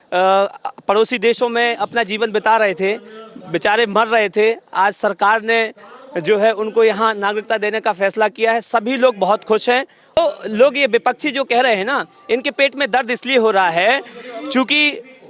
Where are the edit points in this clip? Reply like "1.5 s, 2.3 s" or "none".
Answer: 10.2 s